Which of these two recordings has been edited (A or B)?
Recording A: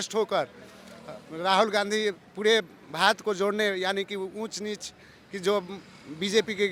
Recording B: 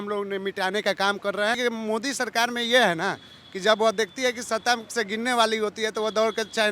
B